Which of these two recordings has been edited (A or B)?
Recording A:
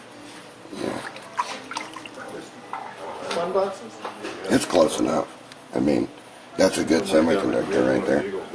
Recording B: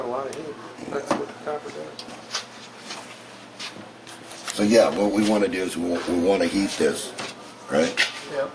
A